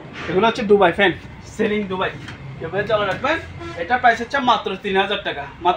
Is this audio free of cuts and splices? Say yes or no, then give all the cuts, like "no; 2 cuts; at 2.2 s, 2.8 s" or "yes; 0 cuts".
yes; 0 cuts